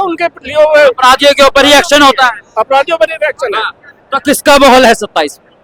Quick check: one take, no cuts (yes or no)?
yes